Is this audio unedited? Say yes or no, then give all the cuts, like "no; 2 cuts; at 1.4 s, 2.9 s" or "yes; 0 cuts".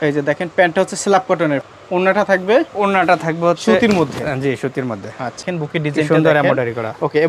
no; 2 cuts; at 1.7 s, 5.4 s